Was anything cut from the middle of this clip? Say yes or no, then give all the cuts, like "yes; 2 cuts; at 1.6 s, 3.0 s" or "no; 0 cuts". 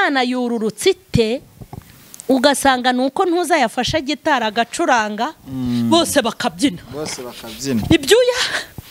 no; 0 cuts